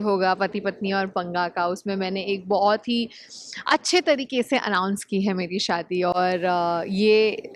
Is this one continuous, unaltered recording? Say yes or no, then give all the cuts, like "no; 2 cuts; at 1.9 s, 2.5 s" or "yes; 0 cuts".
yes; 0 cuts